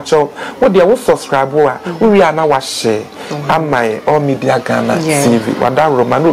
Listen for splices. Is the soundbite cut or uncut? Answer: uncut